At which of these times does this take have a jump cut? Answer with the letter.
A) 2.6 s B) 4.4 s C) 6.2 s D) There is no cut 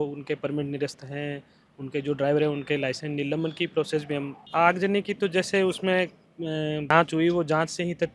B